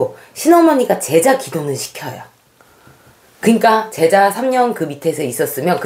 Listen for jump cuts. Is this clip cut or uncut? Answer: uncut